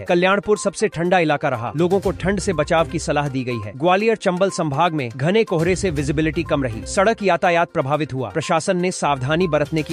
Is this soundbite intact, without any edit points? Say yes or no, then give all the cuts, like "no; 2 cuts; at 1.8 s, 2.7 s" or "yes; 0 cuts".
yes; 0 cuts